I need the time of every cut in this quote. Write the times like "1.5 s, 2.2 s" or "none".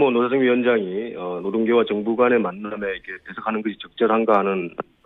none